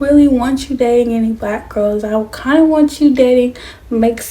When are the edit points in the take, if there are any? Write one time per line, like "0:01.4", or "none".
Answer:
none

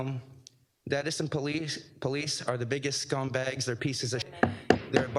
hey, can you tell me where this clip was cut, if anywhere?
0:04.3

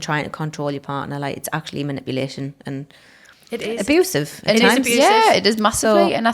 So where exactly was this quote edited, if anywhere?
none

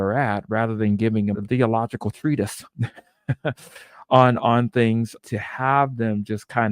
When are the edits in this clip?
0:01.4
0:05.1

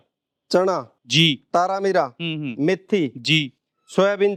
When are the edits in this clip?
none

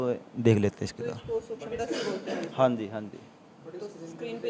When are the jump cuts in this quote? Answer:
none

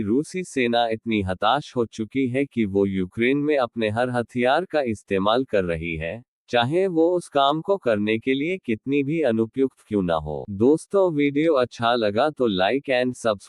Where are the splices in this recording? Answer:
0:10.4

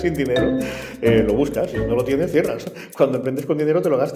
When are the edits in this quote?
none

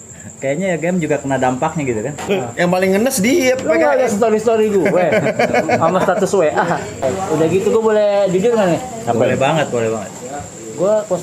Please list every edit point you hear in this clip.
0:02.3
0:07.1

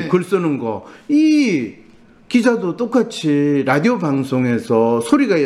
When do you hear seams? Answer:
none

